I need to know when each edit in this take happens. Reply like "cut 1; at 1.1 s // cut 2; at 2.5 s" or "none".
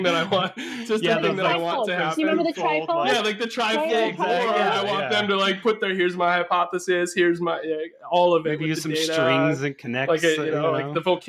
none